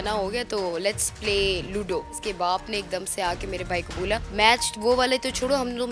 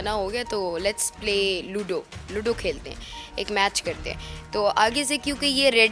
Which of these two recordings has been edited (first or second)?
first